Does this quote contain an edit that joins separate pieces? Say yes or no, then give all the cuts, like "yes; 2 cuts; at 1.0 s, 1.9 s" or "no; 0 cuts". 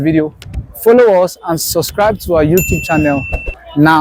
no; 0 cuts